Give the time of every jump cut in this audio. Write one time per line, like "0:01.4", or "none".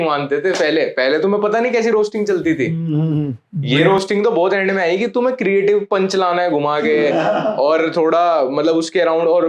none